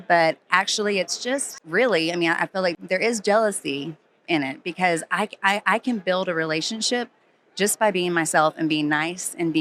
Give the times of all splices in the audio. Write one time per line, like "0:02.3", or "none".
0:01.6
0:02.8